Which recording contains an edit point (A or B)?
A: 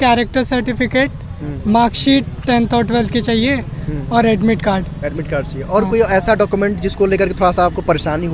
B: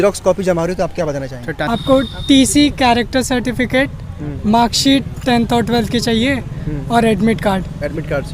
B